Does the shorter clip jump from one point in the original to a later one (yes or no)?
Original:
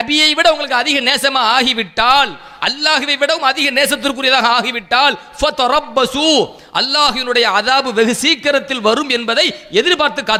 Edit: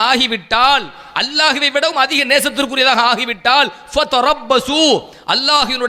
no